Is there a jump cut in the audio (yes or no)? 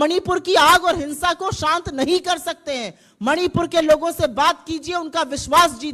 no